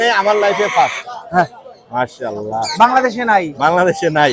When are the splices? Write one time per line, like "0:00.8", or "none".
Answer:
none